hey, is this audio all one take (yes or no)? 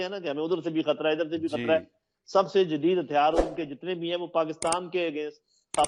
yes